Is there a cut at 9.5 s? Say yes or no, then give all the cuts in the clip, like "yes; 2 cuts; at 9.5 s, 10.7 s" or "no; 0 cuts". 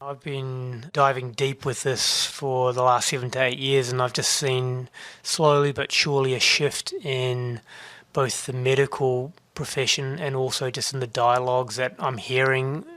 no; 1 cut; at 0.9 s